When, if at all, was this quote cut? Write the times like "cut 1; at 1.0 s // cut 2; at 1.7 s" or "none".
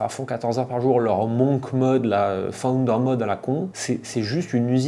none